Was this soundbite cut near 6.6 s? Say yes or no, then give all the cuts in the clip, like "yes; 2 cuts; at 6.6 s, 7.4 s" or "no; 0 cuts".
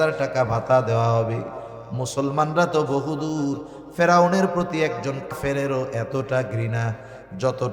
no; 1 cut; at 5.3 s